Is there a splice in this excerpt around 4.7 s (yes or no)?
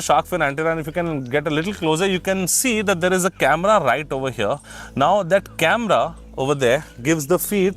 no